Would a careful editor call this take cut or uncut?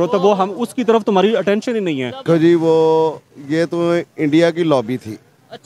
cut